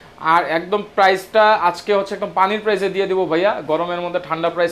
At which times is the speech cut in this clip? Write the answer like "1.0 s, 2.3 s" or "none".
none